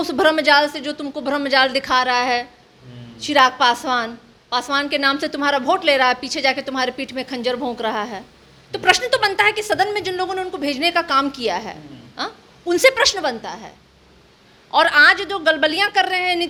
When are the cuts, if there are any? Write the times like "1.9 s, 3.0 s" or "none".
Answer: none